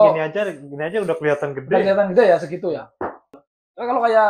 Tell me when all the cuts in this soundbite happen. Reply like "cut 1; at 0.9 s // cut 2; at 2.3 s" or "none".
cut 1; at 3.3 s